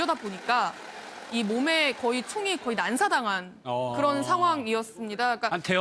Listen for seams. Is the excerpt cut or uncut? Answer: cut